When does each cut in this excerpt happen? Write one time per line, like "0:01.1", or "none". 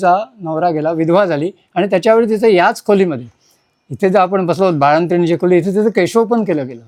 none